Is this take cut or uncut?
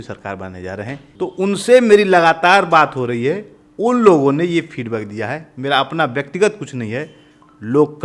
cut